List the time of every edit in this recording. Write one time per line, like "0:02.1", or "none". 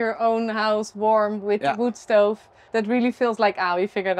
0:02.5